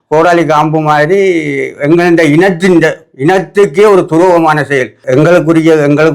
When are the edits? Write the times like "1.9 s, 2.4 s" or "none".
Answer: 5.0 s